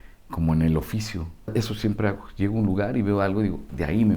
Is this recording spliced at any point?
yes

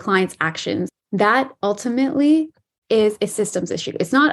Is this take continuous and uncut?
no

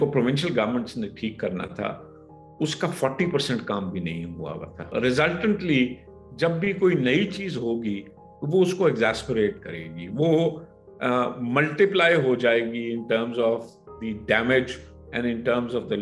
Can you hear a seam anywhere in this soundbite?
yes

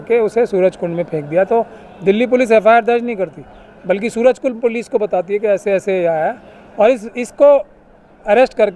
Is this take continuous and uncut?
yes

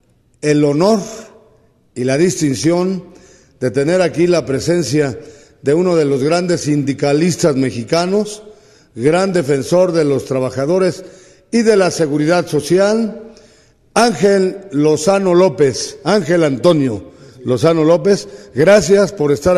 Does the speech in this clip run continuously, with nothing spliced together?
yes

